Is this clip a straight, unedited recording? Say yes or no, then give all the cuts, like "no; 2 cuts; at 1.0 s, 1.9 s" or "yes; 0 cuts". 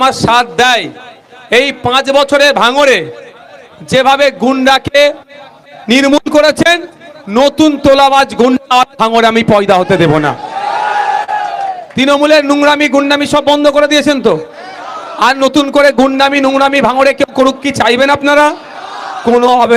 yes; 0 cuts